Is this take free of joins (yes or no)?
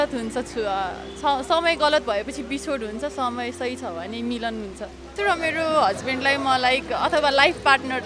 no